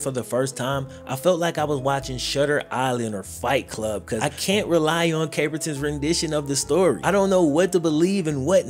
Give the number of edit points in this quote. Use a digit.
2